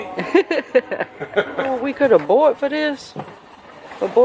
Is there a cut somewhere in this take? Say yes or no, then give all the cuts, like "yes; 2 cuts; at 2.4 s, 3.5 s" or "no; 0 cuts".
yes; 1 cut; at 1.8 s